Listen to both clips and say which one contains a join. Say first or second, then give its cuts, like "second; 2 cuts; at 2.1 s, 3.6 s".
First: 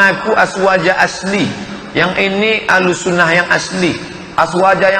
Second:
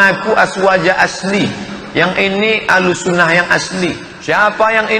second; 1 cut; at 4.1 s